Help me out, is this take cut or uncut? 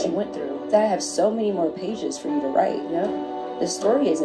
uncut